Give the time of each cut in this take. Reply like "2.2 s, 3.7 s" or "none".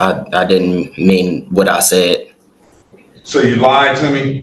none